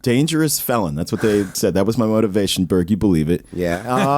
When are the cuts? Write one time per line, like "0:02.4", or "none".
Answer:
0:01.5